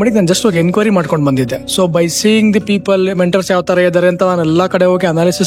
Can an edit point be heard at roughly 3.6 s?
no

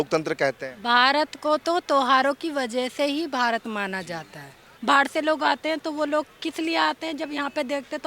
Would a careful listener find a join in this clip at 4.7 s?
yes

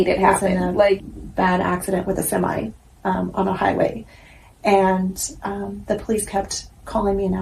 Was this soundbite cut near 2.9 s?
no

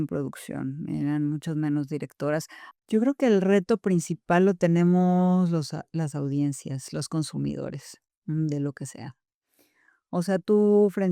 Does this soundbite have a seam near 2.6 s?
yes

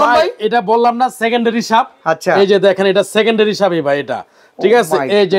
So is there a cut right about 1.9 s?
no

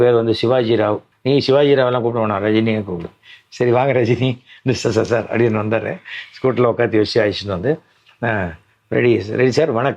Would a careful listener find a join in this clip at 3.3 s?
no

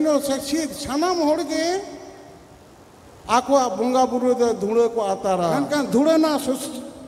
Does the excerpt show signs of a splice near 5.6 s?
yes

